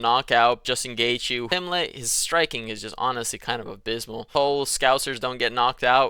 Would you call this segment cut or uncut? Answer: cut